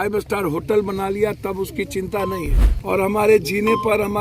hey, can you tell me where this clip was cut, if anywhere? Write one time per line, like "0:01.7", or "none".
0:02.7